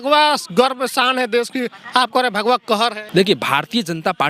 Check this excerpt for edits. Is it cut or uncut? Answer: cut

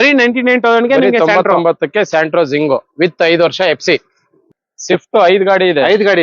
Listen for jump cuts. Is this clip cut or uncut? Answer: cut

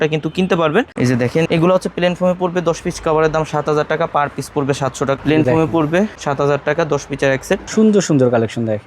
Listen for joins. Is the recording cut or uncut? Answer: cut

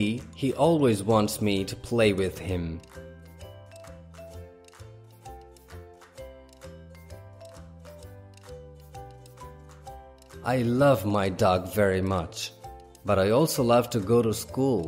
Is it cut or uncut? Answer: uncut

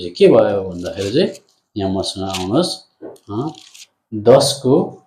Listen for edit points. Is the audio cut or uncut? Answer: uncut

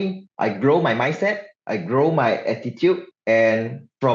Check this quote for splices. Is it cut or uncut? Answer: uncut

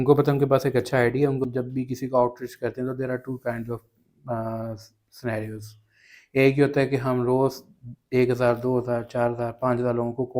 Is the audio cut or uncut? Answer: cut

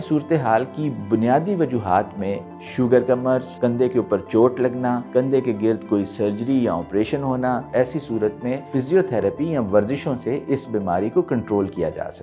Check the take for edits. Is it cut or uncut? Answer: cut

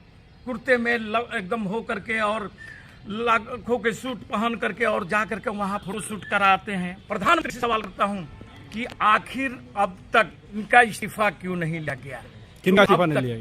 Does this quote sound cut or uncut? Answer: cut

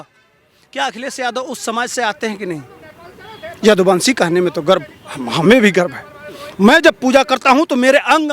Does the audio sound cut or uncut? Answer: uncut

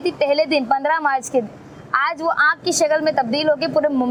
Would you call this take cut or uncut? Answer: uncut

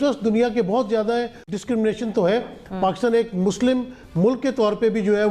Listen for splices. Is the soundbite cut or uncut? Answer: cut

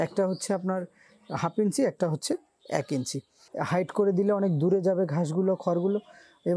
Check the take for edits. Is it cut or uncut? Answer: cut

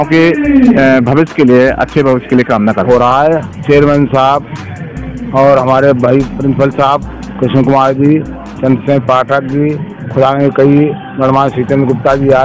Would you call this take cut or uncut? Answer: cut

